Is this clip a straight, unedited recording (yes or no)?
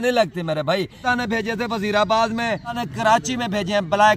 no